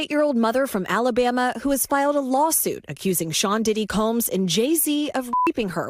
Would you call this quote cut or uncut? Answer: uncut